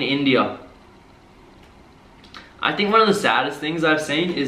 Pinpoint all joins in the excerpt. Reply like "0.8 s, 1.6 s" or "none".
none